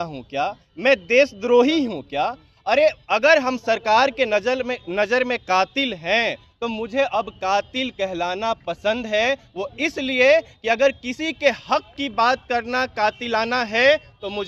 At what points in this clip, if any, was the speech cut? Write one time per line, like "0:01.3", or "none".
none